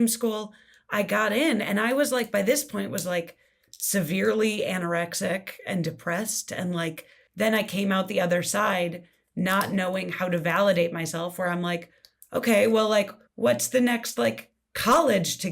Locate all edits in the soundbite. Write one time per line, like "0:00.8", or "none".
0:07.2
0:13.2